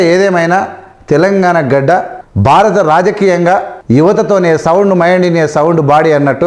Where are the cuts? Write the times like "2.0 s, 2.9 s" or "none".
2.2 s, 3.7 s